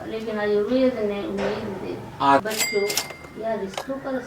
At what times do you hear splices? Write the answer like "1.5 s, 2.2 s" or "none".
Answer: 2.4 s